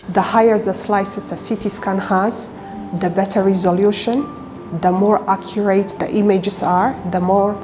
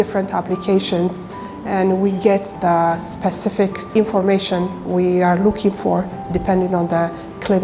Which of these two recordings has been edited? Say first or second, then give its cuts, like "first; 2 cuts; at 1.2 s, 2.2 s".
first; 1 cut; at 5.9 s